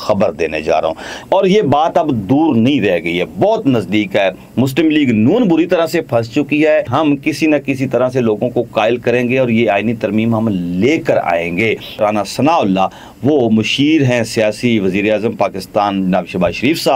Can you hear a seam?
yes; 3 cuts; at 1.1 s, 6.9 s, 12.0 s

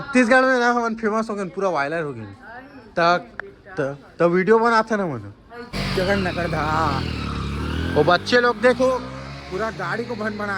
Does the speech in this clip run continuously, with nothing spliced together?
no; 1 cut; at 5.8 s

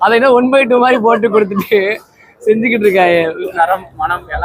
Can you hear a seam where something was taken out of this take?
yes; 1 cut; at 3.5 s

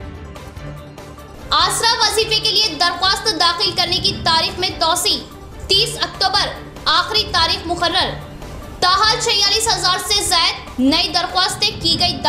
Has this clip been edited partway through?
no; 0 cuts

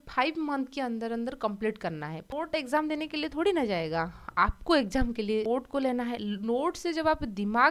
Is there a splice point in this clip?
yes; 2 cuts; at 2.3 s, 5.5 s

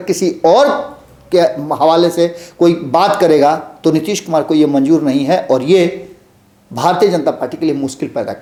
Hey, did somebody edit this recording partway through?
no; 0 cuts

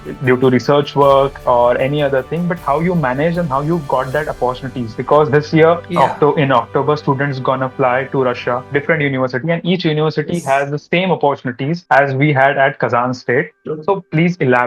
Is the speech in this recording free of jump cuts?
yes; 0 cuts

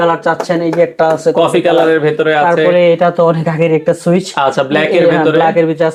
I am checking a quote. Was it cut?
no; 0 cuts

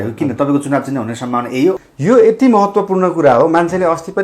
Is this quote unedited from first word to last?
no; 1 cut; at 1.8 s

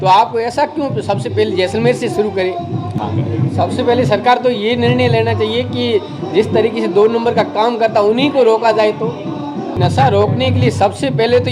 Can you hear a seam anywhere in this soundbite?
yes; 2 cuts; at 3.0 s, 9.8 s

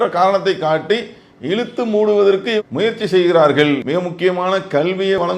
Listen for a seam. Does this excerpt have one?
no; 0 cuts

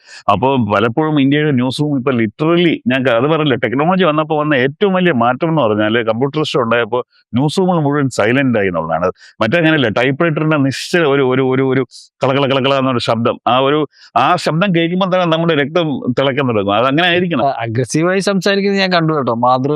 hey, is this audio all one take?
no; 1 cut; at 17.4 s

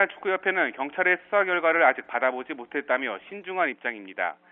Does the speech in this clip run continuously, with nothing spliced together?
no; 1 cut; at 3.3 s

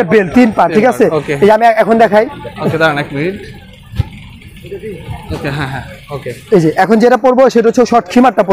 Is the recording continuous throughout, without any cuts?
yes; 0 cuts

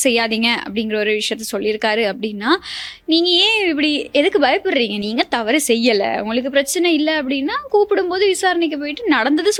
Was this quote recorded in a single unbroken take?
yes; 0 cuts

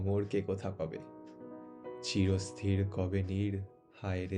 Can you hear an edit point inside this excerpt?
no; 0 cuts

